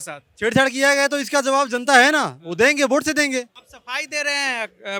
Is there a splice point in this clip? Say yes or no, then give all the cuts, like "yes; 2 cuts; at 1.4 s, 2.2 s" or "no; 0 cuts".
no; 0 cuts